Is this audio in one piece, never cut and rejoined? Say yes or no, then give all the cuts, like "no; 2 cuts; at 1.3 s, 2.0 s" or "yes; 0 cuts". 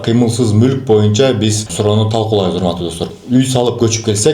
no; 2 cuts; at 1.6 s, 3.0 s